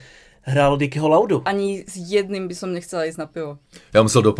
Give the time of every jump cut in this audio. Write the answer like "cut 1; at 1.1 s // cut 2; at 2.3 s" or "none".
cut 1; at 1.5 s